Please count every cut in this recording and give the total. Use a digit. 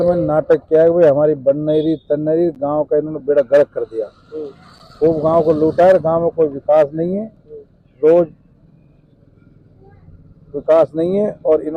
0